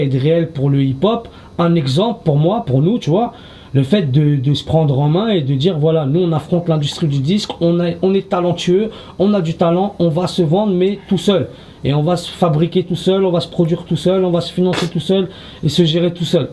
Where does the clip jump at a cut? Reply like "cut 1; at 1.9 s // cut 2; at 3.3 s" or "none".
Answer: cut 1; at 1.5 s